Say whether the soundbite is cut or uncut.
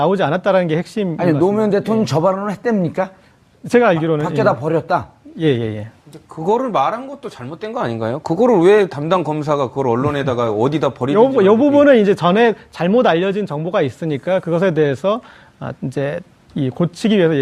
cut